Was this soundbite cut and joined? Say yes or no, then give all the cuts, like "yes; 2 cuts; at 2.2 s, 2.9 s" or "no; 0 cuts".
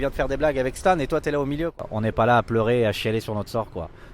yes; 1 cut; at 1.8 s